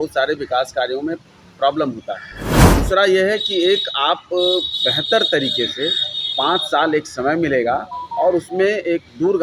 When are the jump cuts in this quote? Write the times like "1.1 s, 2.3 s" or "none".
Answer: 2.7 s